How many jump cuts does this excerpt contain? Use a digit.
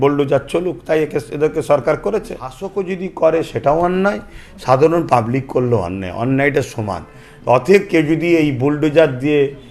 1